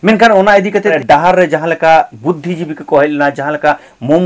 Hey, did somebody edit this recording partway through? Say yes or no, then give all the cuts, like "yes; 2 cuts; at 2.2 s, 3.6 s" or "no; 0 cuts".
yes; 1 cut; at 1.0 s